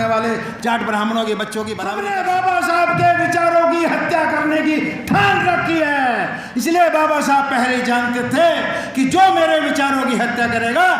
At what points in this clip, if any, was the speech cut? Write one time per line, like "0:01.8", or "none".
0:02.0